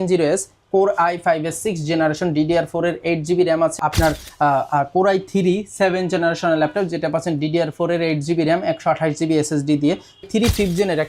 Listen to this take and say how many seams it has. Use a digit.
2